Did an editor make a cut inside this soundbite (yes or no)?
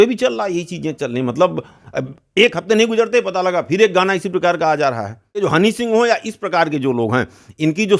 yes